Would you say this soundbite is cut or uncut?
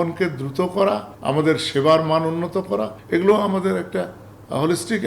cut